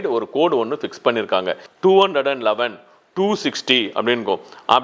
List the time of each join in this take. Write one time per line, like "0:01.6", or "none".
0:01.6